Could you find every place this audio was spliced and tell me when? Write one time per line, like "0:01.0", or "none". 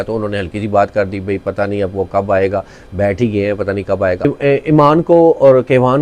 0:04.2